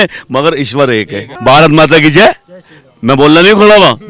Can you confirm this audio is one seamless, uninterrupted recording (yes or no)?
no